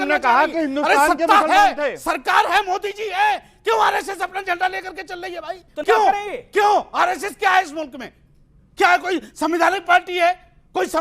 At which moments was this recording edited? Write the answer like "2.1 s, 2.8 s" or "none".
5.8 s